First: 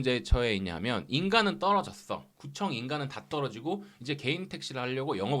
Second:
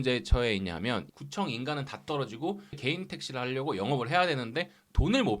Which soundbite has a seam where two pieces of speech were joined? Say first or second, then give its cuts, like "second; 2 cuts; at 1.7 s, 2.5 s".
second; 2 cuts; at 1.0 s, 2.8 s